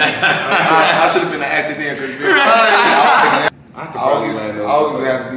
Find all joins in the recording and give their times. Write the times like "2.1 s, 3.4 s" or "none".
3.5 s